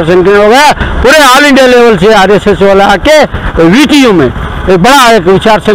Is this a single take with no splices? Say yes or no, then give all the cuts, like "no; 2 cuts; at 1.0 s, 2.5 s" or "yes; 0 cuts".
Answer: yes; 0 cuts